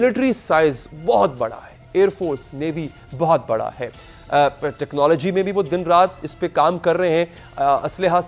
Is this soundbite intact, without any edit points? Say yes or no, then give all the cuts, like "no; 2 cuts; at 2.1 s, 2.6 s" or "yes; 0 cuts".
yes; 0 cuts